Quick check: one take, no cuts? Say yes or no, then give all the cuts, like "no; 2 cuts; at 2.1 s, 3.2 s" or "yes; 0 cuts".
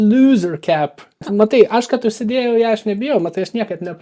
no; 1 cut; at 1.3 s